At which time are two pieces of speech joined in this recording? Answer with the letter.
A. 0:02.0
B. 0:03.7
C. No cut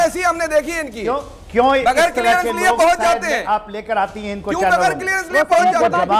C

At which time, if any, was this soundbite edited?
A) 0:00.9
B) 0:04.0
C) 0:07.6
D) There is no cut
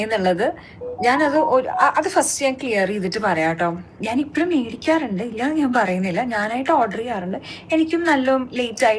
B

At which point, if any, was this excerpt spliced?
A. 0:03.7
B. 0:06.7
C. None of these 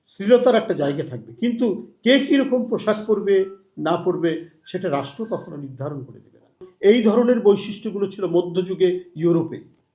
B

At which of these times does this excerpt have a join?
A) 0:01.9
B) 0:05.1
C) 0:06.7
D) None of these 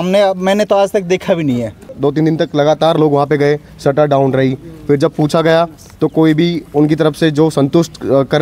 A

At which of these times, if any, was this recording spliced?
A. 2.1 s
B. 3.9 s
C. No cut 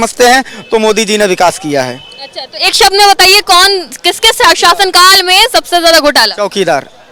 C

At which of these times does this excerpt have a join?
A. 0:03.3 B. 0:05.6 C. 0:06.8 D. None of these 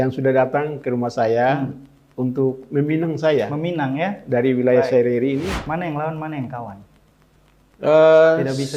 B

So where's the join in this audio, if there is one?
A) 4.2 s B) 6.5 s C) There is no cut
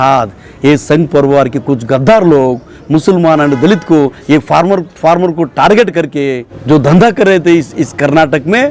B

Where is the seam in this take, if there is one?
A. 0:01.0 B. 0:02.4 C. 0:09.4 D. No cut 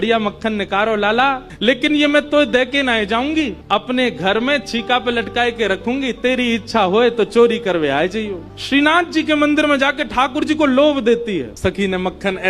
B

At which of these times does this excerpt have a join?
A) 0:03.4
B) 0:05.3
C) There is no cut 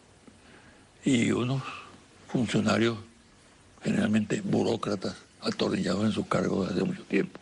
B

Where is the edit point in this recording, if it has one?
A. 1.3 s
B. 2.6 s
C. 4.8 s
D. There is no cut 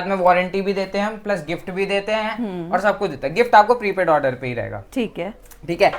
D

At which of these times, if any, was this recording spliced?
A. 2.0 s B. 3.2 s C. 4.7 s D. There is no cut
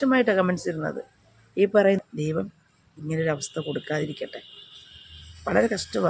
A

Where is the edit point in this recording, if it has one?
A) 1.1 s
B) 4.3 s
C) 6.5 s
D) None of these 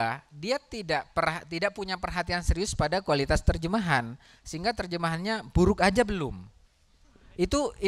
D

